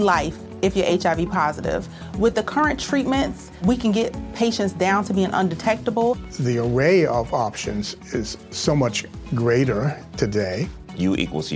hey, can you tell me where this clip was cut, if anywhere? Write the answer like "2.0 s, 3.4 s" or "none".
none